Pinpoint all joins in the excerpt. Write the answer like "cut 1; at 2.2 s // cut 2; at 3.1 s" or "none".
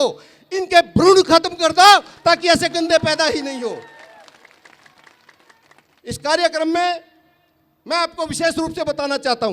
none